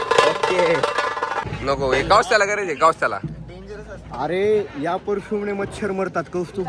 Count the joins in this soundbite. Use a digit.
1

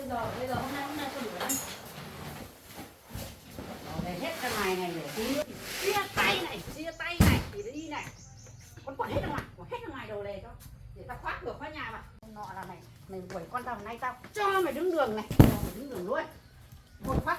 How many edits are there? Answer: 2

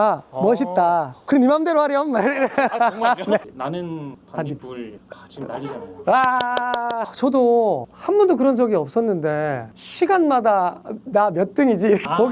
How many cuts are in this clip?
2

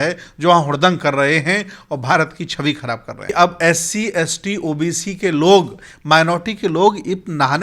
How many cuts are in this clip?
1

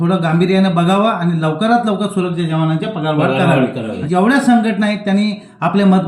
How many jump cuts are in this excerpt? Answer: 1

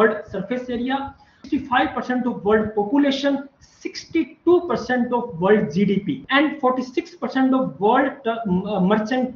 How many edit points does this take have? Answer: 2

